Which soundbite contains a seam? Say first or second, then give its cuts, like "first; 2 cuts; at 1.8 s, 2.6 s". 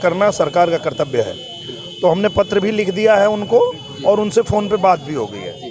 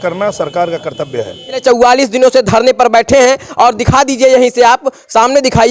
second; 1 cut; at 1.6 s